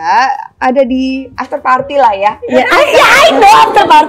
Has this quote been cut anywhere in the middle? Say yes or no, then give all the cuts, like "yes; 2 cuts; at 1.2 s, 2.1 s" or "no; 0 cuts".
yes; 1 cut; at 1.3 s